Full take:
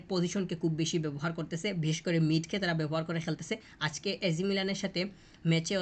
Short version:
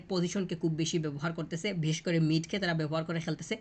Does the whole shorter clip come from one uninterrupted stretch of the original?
yes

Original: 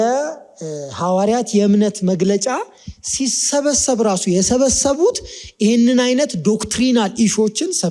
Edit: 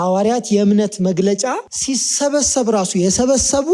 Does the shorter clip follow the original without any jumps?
no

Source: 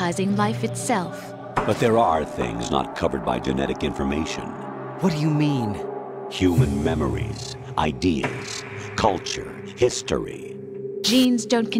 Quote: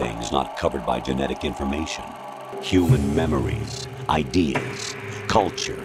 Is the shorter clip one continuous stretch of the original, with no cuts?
no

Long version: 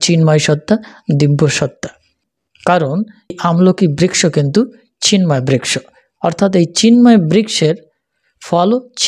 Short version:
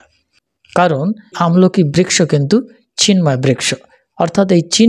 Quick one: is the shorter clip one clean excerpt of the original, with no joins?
no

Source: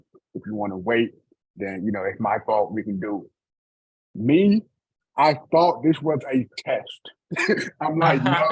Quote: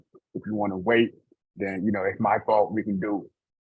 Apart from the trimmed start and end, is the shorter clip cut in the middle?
no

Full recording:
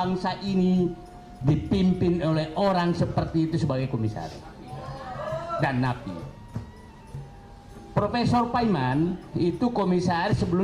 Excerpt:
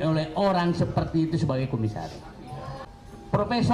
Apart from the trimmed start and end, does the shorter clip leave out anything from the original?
yes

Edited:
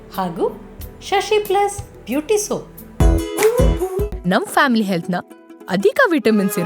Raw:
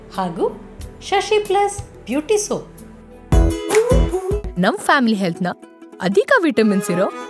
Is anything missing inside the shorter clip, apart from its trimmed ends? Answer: yes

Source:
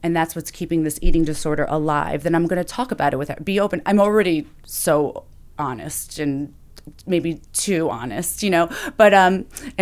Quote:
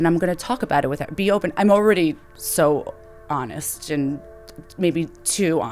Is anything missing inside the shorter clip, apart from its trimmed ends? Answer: no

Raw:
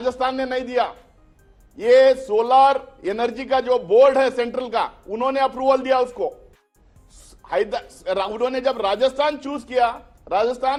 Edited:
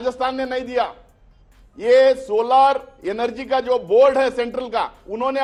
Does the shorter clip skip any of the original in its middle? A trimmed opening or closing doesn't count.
no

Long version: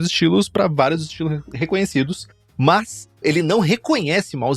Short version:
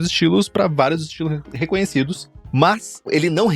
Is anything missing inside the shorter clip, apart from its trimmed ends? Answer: yes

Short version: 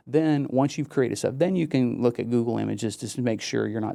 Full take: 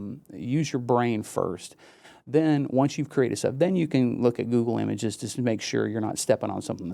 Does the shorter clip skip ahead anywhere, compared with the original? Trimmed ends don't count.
no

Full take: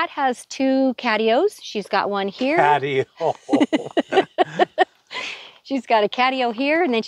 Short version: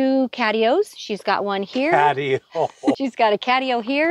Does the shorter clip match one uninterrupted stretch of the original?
no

